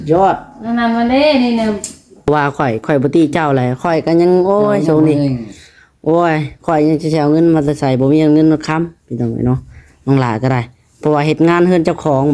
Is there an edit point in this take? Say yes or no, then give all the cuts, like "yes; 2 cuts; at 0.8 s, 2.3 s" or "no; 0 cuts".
yes; 1 cut; at 2.3 s